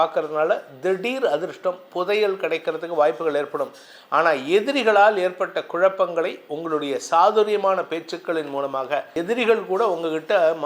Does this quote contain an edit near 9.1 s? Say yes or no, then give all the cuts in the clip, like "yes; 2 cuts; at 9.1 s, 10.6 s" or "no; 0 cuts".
yes; 1 cut; at 9.1 s